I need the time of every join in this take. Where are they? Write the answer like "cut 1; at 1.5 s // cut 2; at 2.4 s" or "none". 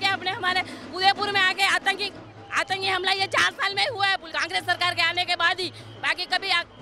cut 1; at 4.3 s